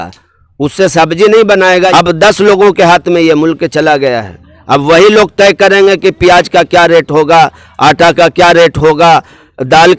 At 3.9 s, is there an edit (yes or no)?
no